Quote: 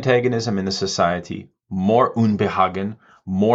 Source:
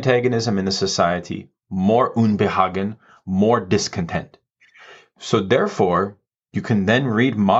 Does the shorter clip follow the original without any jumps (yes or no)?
yes